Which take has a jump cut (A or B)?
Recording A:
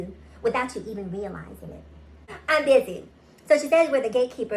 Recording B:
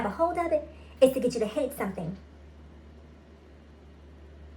A